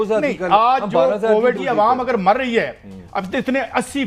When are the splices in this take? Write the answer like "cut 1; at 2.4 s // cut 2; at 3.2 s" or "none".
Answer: cut 1; at 1.6 s